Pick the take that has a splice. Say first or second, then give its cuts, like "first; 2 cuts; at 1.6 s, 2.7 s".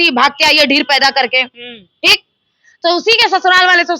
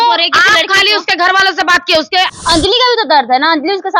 second; 1 cut; at 2.3 s